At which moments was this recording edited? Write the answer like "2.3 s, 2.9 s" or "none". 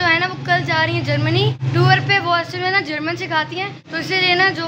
1.6 s, 3.8 s